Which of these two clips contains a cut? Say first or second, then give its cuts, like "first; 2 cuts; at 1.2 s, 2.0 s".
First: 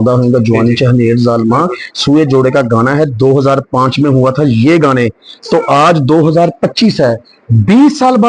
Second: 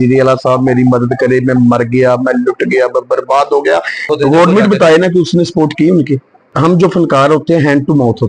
second; 2 cuts; at 4.0 s, 6.4 s